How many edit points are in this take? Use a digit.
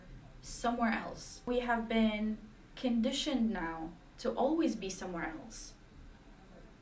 1